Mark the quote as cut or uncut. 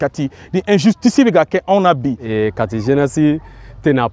cut